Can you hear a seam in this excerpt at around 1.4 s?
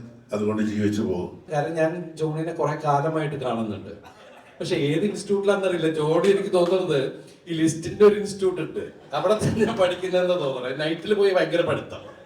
yes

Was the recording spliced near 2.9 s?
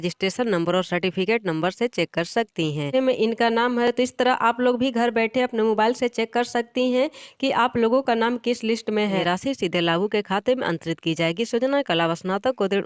yes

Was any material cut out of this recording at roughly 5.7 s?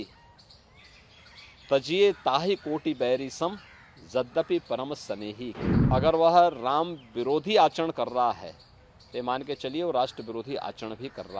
yes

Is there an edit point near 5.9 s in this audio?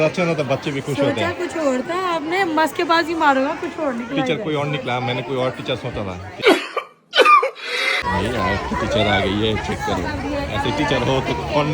no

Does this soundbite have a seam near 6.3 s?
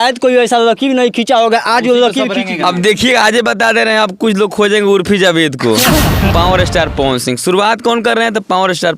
yes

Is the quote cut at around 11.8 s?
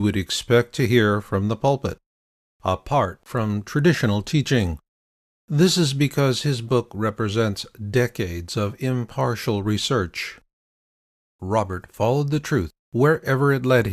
no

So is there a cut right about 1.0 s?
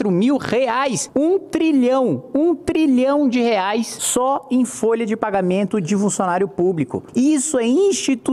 yes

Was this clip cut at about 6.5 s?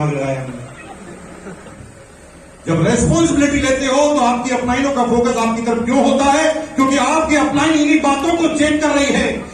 no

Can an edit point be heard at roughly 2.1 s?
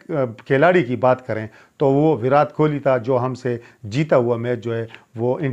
no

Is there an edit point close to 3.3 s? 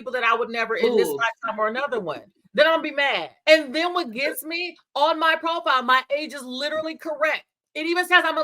yes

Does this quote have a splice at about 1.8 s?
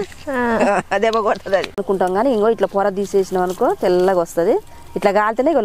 yes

